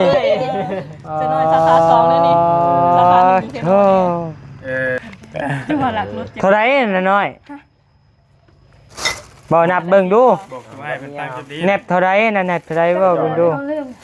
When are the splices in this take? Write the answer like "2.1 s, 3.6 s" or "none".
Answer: 5.1 s